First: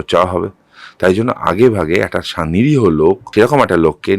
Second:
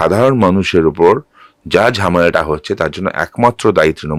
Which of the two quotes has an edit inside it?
first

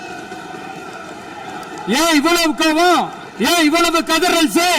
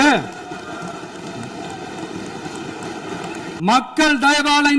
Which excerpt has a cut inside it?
second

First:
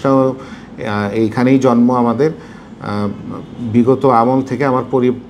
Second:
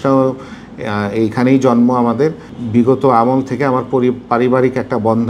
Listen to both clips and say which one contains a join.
second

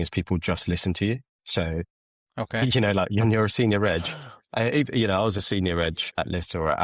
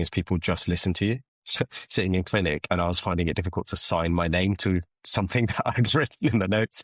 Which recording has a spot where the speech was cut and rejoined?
second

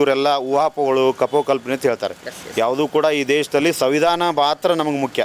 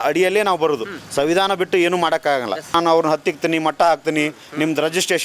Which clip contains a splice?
second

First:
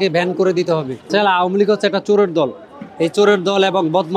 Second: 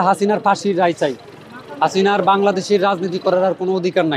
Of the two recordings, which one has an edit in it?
first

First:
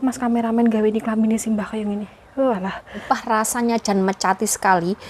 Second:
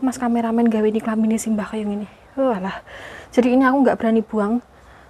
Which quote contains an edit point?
first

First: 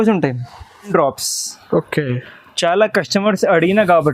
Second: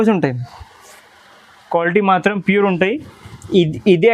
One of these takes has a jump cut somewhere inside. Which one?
first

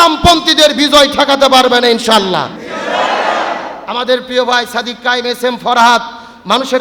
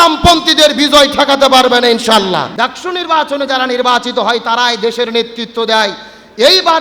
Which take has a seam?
second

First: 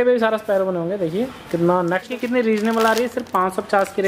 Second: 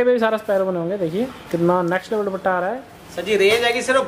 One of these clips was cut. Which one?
first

